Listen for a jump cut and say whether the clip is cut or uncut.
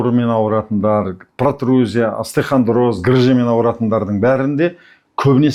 uncut